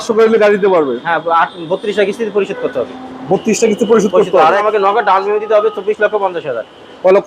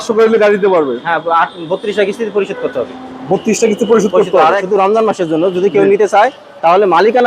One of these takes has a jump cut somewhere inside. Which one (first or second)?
second